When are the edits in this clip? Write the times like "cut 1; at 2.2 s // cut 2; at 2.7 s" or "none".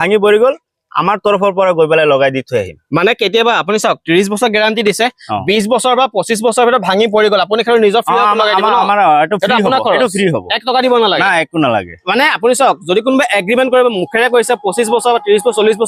none